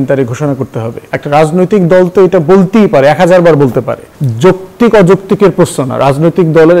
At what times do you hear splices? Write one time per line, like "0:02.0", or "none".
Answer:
0:01.0
0:04.1